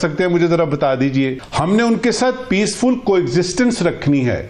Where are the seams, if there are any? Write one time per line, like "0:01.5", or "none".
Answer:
0:01.4